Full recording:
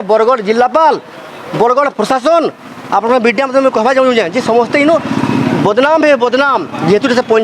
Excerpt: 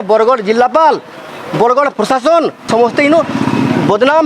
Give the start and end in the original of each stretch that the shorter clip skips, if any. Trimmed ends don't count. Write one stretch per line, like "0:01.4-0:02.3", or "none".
0:02.6-0:04.4

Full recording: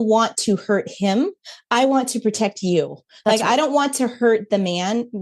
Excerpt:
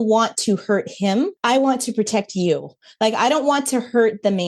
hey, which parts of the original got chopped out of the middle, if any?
0:01.4-0:01.6

